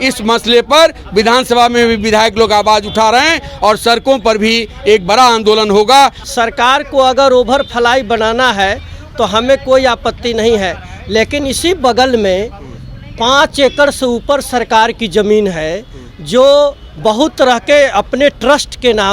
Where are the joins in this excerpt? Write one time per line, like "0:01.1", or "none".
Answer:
0:06.2